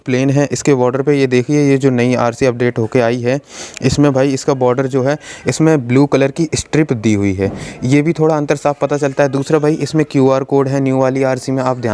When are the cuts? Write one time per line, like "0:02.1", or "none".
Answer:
none